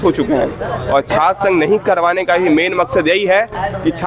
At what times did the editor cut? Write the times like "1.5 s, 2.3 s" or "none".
none